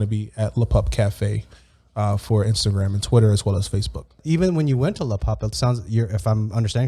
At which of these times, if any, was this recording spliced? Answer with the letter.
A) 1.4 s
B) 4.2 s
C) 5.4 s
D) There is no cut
B